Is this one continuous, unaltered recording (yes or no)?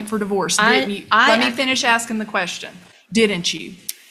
yes